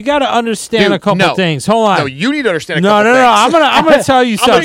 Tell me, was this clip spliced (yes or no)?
no